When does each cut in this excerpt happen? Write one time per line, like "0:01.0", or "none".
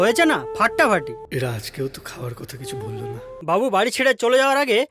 0:01.2
0:03.4